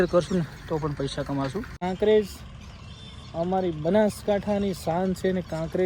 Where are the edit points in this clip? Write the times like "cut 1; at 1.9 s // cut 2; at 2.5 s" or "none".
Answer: cut 1; at 1.7 s